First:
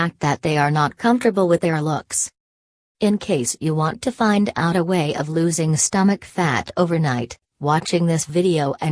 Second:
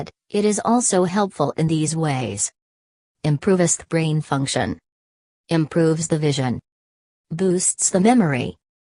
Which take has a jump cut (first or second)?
first